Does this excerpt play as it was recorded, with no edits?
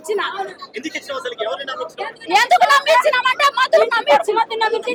yes; 0 cuts

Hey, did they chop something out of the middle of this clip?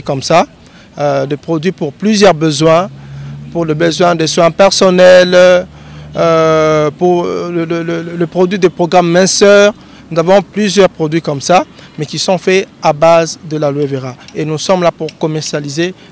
no; 0 cuts

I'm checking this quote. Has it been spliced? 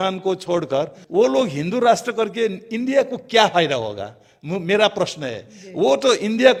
no; 0 cuts

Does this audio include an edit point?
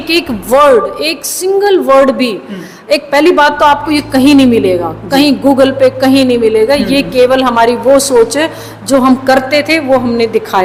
no; 0 cuts

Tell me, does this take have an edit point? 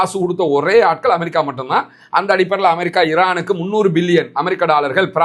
no; 0 cuts

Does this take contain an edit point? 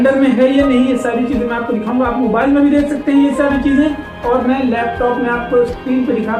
no; 0 cuts

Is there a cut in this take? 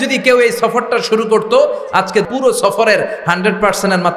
yes; 1 cut; at 2.2 s

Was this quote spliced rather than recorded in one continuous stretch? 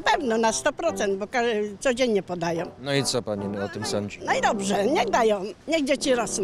no; 0 cuts

